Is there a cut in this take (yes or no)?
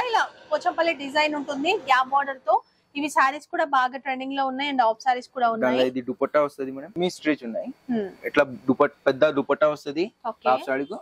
no